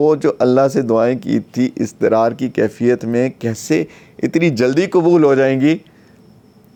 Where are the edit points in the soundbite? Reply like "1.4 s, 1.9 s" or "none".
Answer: none